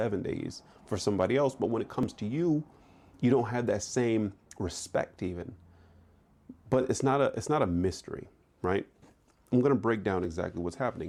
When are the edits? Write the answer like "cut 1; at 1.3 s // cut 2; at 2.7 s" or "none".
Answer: none